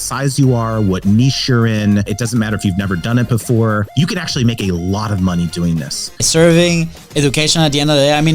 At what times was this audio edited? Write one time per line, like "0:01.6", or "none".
0:02.1
0:03.9
0:06.2